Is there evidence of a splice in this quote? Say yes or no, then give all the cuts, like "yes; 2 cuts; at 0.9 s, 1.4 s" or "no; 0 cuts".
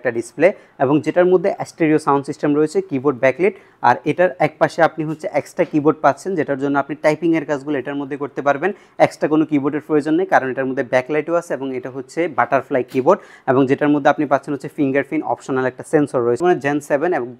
yes; 1 cut; at 16.4 s